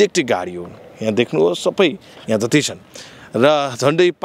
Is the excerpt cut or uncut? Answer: uncut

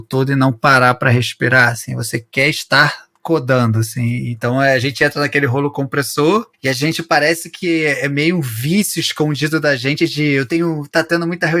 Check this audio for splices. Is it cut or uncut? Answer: uncut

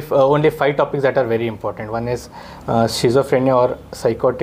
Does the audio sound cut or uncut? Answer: uncut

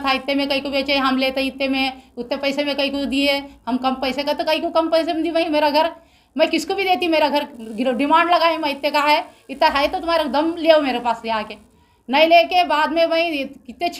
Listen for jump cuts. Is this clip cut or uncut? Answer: uncut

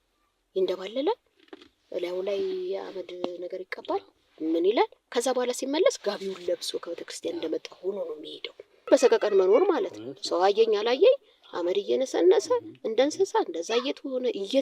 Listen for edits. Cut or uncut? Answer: cut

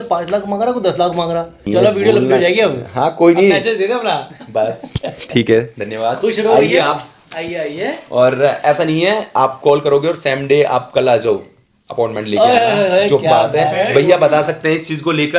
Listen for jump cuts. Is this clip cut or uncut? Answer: uncut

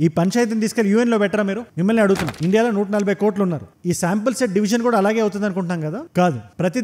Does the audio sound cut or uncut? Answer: cut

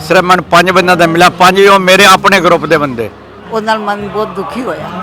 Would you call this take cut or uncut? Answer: cut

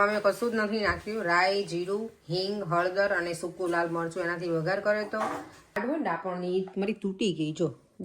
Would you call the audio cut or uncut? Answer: cut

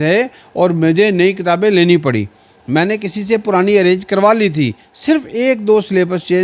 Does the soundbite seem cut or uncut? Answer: uncut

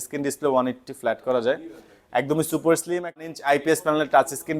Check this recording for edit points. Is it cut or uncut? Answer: cut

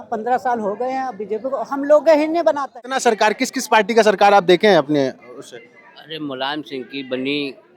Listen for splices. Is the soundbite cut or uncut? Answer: cut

